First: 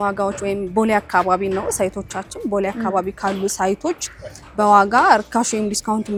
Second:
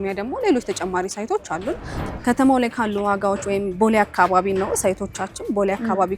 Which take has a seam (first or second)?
second